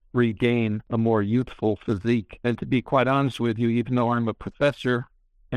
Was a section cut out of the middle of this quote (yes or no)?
yes